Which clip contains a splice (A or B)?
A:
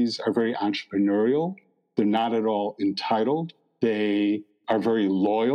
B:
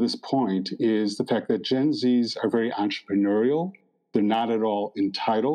A